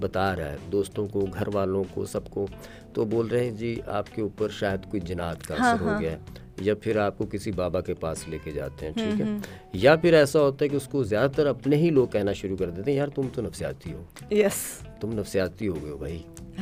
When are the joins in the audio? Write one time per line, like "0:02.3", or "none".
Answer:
none